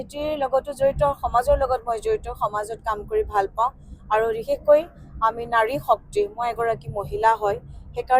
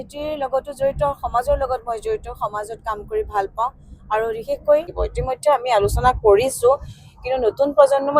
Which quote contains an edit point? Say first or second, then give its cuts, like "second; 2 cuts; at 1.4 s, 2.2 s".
second; 1 cut; at 5.0 s